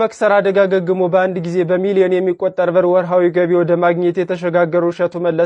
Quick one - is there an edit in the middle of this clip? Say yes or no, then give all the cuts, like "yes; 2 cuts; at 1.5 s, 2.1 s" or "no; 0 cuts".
no; 0 cuts